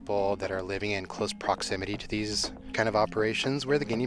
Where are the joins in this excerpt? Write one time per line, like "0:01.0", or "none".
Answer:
0:02.6